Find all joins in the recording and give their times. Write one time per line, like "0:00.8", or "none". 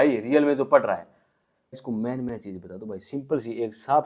0:01.8